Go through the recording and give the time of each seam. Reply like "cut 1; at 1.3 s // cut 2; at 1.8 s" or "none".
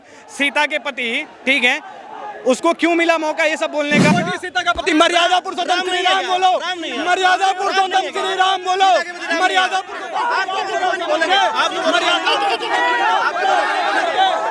cut 1; at 4.1 s

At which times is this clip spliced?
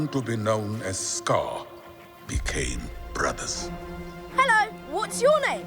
cut 1; at 4.1 s

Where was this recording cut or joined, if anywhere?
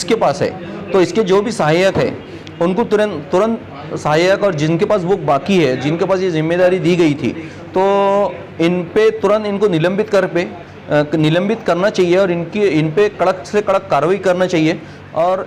none

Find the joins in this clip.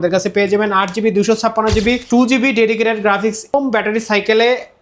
cut 1; at 2.0 s // cut 2; at 3.5 s

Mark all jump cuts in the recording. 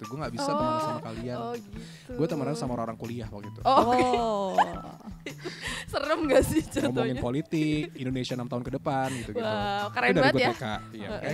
none

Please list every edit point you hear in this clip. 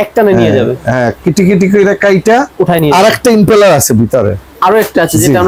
none

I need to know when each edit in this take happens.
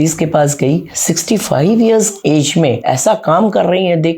cut 1; at 0.9 s // cut 2; at 2.5 s

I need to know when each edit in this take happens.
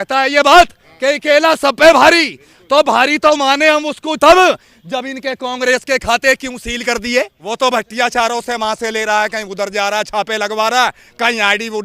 cut 1; at 7.4 s

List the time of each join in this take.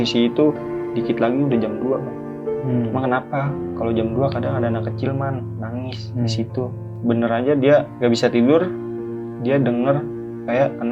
cut 1; at 7.0 s // cut 2; at 7.9 s

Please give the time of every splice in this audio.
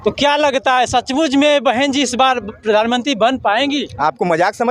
none

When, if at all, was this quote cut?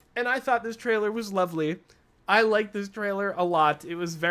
none

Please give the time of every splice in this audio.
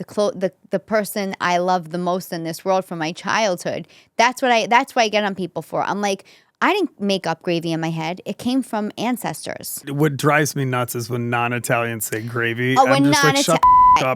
cut 1; at 9.8 s

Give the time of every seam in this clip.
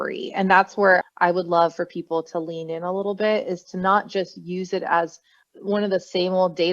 cut 1; at 1.0 s

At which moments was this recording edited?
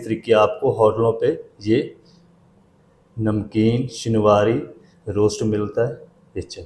none

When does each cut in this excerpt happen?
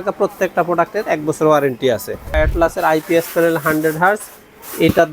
cut 1; at 2.4 s

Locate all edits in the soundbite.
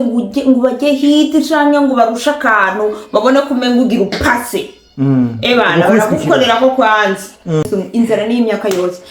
cut 1; at 7.7 s

